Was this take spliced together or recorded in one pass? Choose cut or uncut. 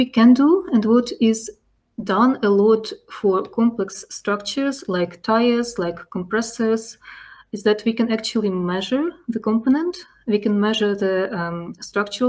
uncut